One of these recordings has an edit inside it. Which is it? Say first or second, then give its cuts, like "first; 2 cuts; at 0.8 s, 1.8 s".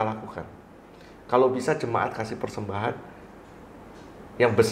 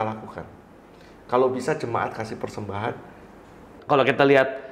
second; 1 cut; at 3.7 s